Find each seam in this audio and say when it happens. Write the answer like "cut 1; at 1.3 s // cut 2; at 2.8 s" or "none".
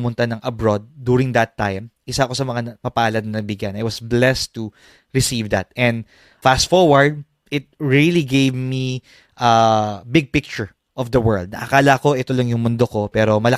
cut 1; at 6.4 s